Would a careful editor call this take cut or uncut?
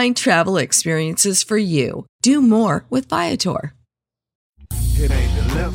cut